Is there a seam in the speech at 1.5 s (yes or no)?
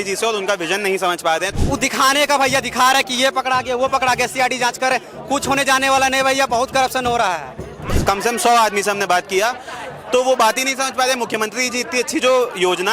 yes